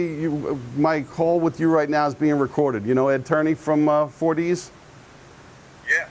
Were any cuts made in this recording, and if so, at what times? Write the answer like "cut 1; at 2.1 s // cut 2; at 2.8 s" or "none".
none